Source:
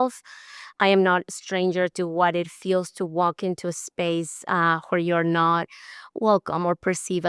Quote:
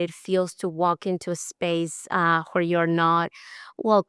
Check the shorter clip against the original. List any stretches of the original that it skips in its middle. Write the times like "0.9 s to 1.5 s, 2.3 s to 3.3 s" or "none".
none